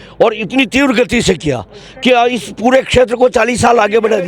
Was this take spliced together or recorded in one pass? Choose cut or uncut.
uncut